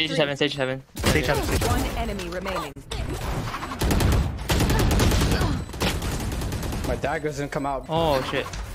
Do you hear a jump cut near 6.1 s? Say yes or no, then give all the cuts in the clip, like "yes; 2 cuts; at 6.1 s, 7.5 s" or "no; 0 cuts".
no; 1 cut; at 7.8 s